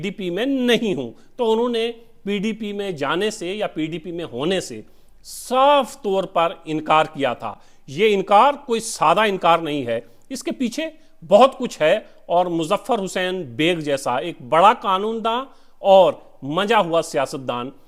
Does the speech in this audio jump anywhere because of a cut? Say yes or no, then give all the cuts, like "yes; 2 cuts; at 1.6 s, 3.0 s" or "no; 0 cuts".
no; 0 cuts